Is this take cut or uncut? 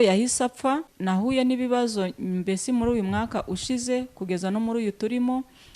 cut